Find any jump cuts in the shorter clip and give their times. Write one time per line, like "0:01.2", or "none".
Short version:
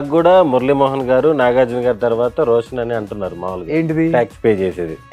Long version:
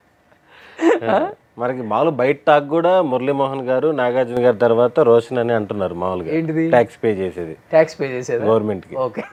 none